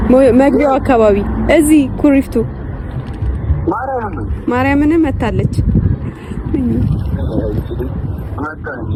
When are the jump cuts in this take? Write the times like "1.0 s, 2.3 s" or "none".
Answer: none